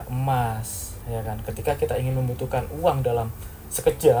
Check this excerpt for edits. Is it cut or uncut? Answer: cut